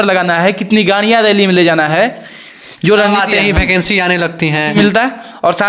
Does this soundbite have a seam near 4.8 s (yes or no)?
yes